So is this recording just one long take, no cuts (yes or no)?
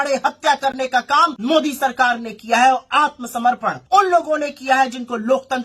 no